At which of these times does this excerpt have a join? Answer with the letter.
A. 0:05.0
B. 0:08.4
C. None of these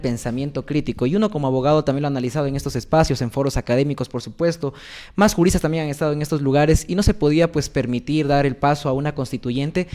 C